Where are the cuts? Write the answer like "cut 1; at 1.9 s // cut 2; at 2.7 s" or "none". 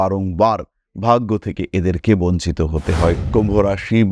cut 1; at 3.2 s